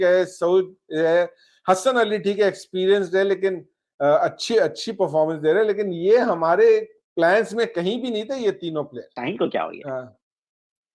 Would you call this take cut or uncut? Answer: cut